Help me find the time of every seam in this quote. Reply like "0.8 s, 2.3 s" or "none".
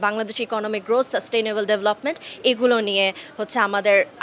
none